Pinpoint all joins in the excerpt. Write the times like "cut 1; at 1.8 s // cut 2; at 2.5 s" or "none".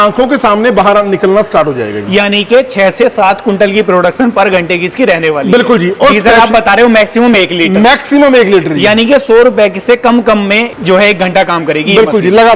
none